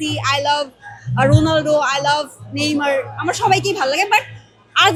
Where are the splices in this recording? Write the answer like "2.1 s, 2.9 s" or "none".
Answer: none